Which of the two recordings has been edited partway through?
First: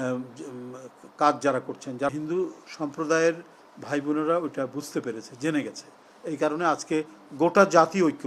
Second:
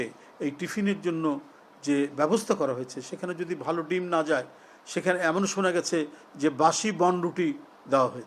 first; 1 cut; at 2.1 s

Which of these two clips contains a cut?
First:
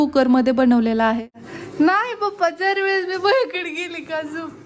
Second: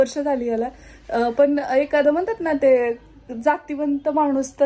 first; 1 cut; at 1.3 s

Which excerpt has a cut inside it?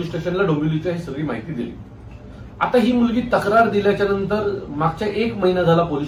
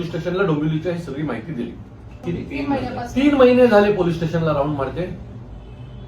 second; 1 cut; at 2.1 s

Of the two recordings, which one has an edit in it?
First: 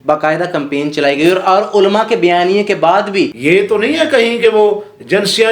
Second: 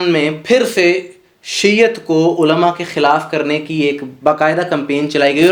first; 1 cut; at 3.3 s

